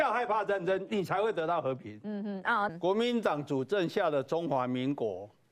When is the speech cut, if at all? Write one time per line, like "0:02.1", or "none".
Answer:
0:02.7